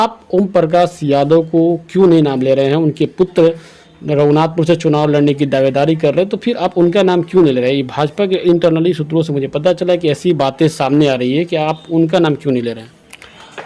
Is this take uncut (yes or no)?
yes